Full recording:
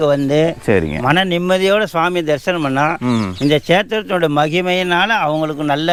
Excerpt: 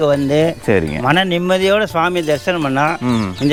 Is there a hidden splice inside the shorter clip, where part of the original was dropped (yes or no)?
no